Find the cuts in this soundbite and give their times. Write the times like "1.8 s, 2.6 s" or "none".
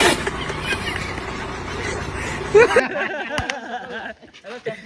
2.8 s